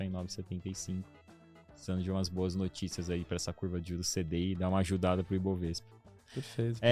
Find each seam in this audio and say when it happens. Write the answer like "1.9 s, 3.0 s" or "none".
none